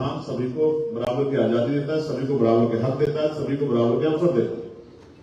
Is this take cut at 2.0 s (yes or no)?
no